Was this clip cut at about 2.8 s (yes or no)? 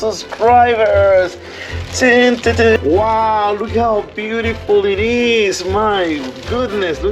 yes